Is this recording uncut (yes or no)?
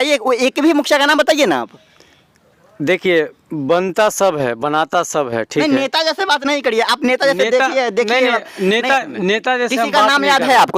yes